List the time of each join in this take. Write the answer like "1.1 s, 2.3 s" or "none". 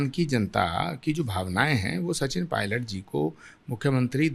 none